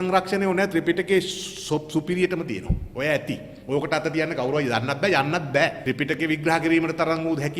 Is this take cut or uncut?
cut